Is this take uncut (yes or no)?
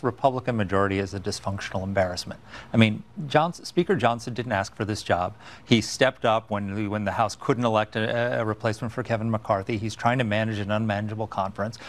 yes